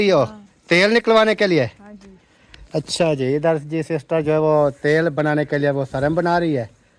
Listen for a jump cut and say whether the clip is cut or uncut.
uncut